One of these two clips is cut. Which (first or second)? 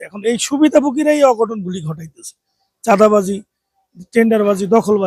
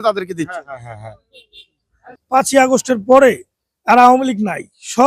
second